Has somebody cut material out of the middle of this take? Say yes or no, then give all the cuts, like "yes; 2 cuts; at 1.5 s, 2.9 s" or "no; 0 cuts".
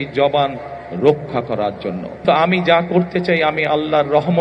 yes; 1 cut; at 2.2 s